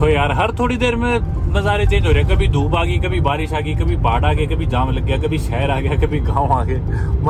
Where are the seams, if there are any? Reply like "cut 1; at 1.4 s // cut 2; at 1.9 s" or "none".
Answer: none